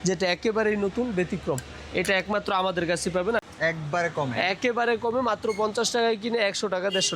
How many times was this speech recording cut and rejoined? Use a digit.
1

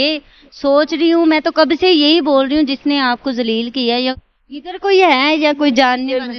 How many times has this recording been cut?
1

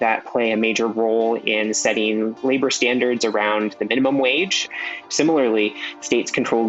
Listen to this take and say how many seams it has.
1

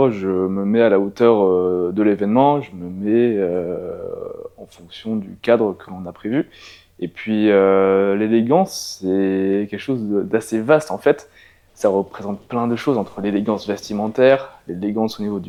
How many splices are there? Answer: 0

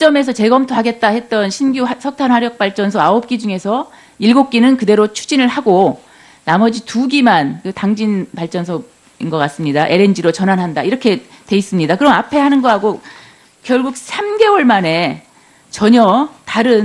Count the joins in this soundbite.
0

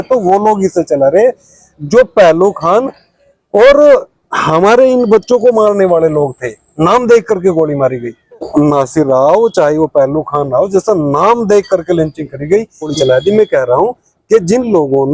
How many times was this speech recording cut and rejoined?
2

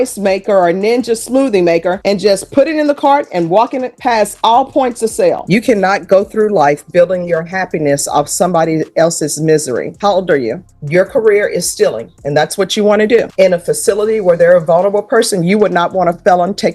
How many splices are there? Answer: 3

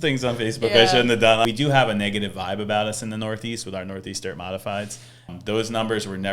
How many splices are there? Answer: 2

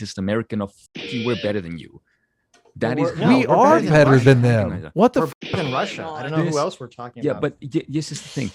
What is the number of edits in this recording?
0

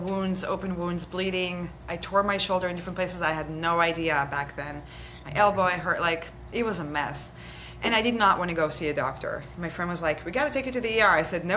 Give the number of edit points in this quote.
0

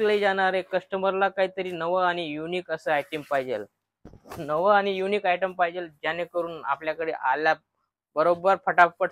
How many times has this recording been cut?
0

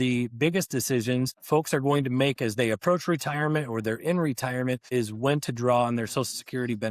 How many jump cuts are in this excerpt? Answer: 2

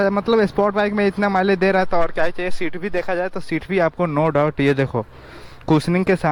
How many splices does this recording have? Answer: 0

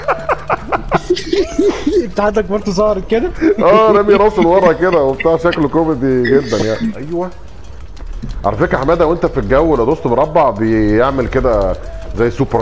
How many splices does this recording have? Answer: 1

